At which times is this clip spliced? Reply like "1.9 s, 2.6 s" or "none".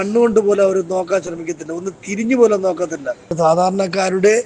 3.3 s